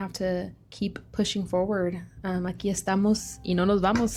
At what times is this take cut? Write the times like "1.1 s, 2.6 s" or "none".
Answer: none

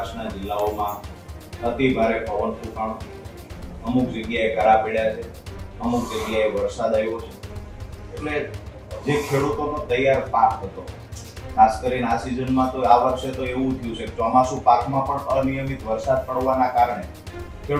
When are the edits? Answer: none

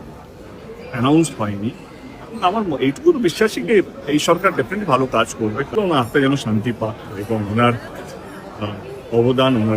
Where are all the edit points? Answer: 5.8 s

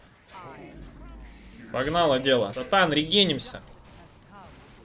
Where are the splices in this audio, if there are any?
2.6 s

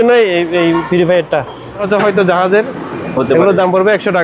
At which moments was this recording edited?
1.8 s

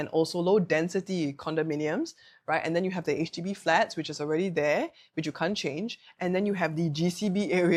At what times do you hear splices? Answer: none

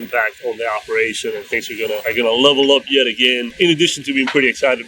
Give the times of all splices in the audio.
2.0 s, 3.5 s

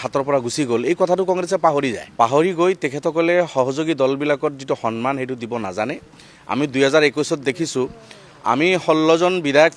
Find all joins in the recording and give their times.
2.0 s

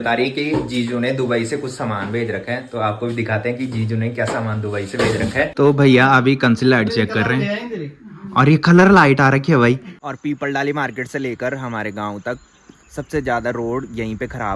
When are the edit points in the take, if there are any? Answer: 5.5 s, 10.0 s

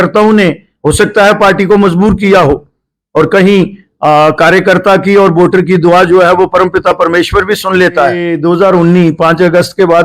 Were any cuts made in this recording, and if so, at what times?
8.3 s

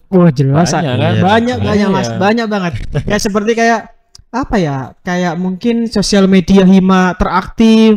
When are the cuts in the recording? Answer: none

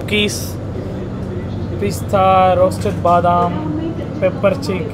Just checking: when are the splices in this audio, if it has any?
none

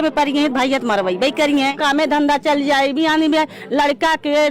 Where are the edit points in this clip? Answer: 1.8 s

